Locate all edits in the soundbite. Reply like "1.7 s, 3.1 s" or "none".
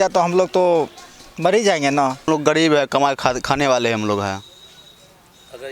2.3 s